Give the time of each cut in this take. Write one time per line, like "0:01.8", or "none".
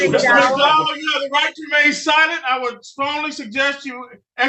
none